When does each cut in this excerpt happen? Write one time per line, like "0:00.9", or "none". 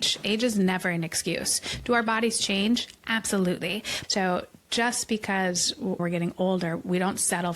0:03.9